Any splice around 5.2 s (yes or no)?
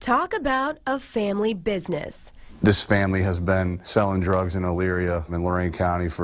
no